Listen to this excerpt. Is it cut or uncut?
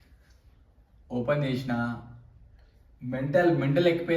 uncut